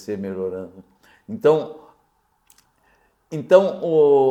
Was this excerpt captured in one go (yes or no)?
yes